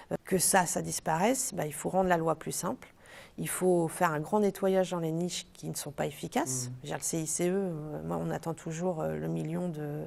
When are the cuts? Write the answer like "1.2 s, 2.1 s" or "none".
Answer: none